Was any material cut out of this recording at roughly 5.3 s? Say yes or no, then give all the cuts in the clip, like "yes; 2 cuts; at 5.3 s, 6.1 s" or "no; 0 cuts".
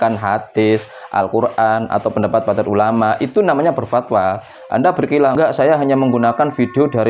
yes; 1 cut; at 5.3 s